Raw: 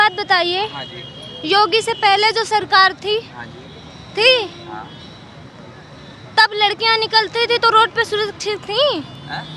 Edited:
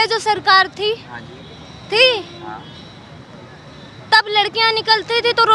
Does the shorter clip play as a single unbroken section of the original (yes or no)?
yes